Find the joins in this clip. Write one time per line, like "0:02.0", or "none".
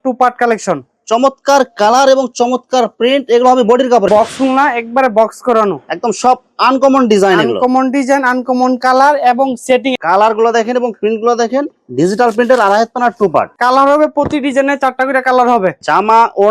0:04.1
0:10.0
0:13.5